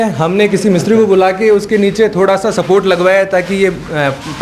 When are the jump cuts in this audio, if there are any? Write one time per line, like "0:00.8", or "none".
none